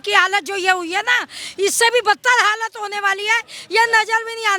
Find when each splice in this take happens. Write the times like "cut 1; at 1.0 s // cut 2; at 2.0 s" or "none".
none